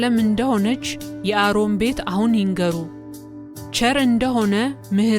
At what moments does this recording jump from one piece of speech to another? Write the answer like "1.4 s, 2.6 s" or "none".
1.2 s